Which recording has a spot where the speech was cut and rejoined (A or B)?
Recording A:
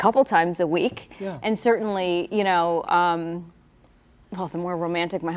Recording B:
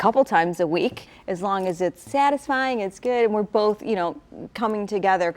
B